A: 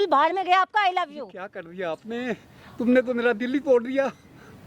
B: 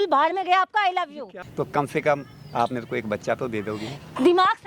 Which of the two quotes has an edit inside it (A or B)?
B